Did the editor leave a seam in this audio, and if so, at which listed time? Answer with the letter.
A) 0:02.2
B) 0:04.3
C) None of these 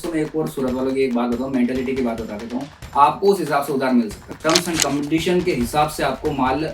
B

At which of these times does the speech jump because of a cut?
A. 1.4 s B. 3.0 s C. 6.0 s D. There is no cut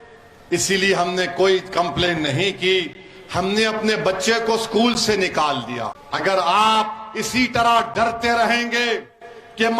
C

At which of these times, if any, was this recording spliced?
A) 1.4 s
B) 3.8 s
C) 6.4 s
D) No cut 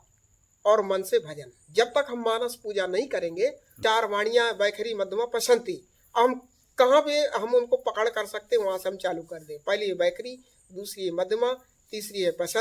B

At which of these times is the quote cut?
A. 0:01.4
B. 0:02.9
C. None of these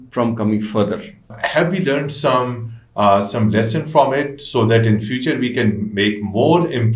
A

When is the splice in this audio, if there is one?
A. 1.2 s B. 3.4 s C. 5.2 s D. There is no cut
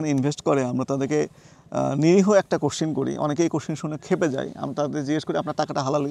D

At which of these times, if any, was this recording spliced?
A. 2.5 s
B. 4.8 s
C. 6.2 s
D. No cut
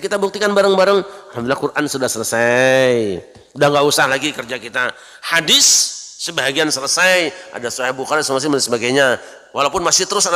D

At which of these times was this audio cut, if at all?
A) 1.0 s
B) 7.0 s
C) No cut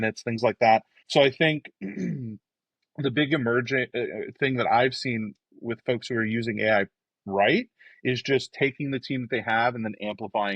A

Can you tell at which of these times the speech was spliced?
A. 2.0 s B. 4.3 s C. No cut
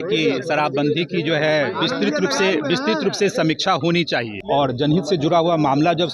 B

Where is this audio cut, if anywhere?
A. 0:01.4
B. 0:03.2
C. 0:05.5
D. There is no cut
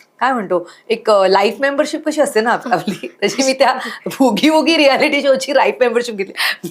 D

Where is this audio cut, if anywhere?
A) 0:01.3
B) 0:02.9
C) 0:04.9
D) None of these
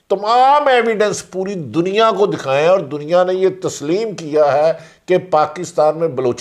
D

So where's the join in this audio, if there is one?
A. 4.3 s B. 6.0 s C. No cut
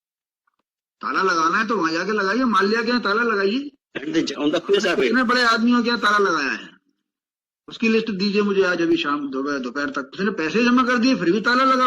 A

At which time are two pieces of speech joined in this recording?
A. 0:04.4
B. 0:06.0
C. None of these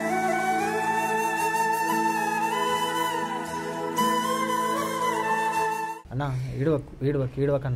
B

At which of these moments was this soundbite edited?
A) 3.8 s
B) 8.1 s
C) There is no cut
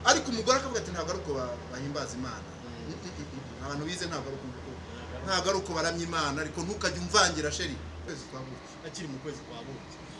B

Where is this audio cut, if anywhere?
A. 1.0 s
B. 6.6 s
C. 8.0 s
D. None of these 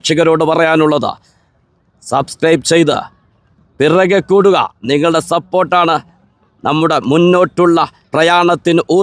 C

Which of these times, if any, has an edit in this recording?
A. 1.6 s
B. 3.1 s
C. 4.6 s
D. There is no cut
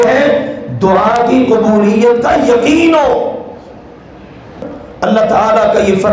C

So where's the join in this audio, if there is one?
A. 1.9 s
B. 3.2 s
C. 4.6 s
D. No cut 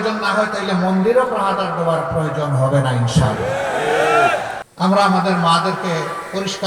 C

